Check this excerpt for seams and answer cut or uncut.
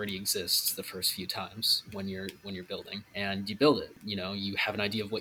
cut